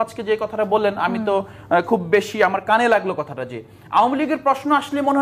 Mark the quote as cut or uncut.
uncut